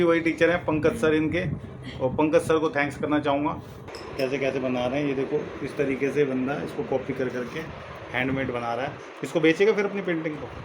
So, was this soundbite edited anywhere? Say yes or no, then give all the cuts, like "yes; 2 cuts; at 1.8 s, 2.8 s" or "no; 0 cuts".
yes; 1 cut; at 3.7 s